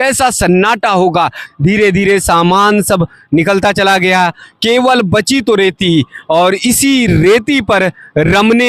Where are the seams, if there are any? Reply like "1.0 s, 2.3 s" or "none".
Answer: 1.4 s

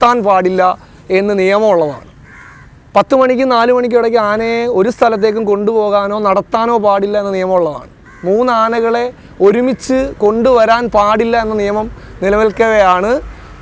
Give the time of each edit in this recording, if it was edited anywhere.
none

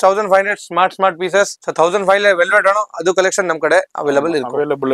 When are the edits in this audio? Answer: 1.6 s

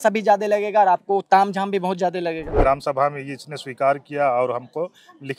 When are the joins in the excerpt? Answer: 2.5 s

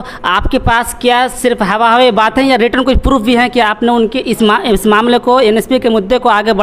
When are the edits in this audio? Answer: none

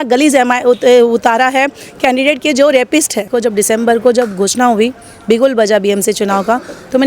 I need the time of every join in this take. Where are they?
3.3 s

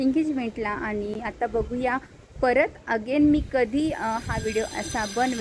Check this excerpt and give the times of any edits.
none

